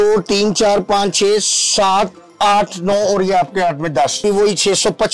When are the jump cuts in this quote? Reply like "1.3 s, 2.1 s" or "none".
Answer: 4.2 s